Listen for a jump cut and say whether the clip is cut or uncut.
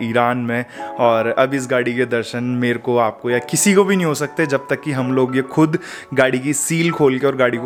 uncut